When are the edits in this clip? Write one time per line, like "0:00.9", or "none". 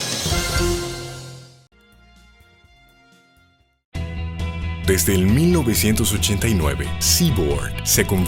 0:00.9